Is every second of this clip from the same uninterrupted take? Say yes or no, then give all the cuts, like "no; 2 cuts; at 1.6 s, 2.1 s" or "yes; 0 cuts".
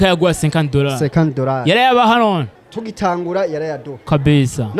no; 1 cut; at 2.5 s